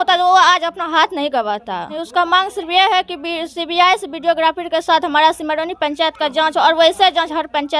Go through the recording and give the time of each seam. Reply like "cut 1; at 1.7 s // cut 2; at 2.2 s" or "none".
cut 1; at 2.0 s